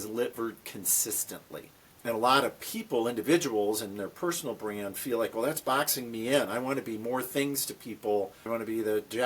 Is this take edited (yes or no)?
yes